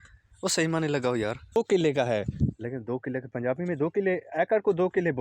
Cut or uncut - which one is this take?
cut